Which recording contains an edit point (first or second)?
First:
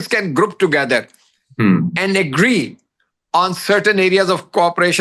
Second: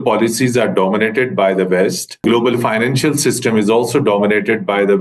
second